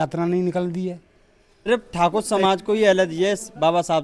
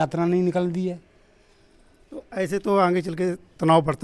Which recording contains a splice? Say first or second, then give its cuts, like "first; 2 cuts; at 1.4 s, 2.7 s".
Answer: first; 1 cut; at 1.7 s